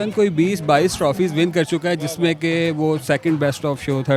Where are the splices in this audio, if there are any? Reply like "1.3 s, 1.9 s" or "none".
none